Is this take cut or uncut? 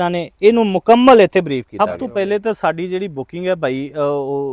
cut